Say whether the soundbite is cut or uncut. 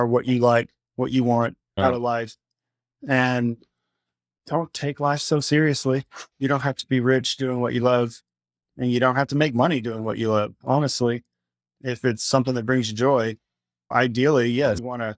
cut